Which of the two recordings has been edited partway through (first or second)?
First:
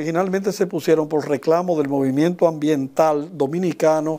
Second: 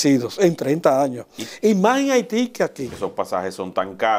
second